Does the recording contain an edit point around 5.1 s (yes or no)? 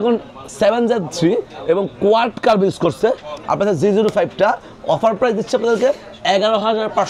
no